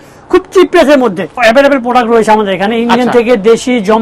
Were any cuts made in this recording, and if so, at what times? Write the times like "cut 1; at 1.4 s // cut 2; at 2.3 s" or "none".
cut 1; at 1.4 s